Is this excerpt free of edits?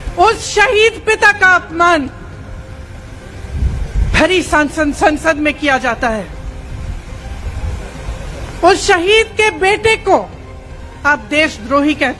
yes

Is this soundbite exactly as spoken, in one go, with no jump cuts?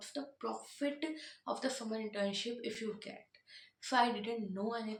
yes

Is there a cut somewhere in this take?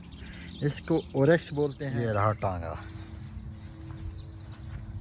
yes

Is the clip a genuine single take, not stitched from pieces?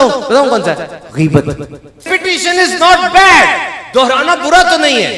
no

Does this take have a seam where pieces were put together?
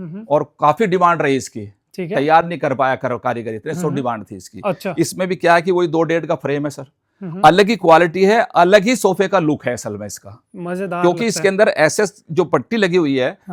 no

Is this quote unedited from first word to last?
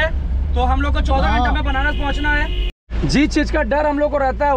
no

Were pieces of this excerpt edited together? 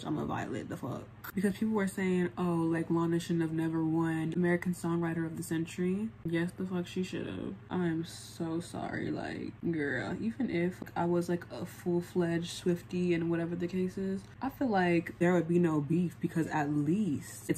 no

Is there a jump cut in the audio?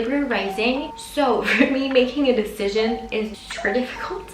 yes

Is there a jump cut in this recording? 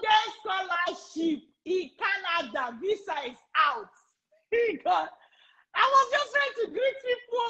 no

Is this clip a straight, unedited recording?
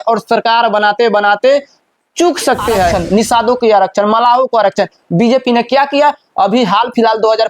no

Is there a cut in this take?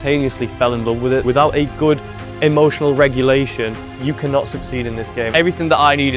yes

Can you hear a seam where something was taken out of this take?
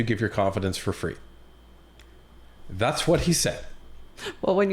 no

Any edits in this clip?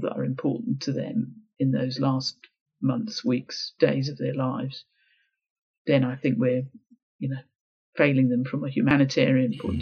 yes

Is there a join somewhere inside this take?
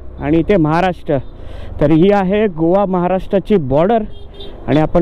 no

